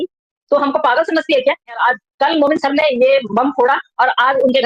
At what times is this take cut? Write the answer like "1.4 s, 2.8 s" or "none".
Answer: 1.8 s